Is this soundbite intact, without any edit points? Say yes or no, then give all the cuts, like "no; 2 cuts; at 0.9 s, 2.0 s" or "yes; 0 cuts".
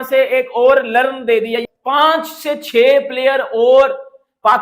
no; 1 cut; at 1.7 s